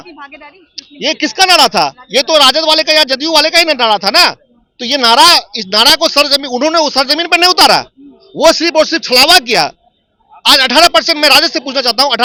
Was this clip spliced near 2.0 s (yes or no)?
no